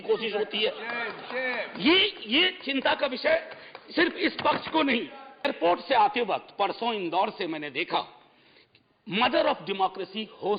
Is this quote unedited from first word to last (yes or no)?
no